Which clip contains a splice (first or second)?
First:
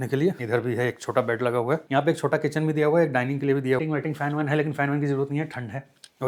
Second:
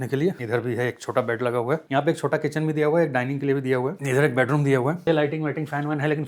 first